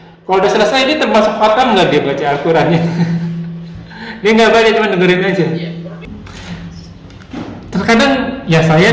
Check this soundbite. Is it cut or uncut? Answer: cut